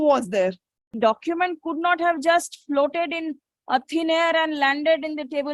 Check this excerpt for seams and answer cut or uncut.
cut